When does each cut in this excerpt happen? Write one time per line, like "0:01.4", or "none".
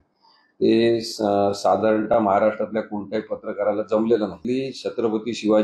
0:04.4